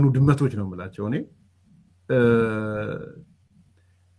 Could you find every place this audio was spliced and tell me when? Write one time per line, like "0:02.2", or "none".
none

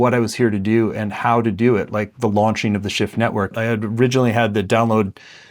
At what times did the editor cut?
0:03.5

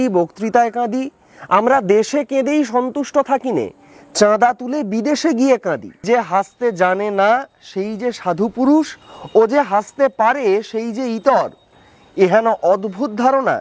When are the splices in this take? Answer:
0:06.0

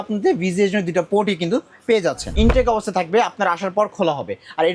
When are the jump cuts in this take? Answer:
0:02.2

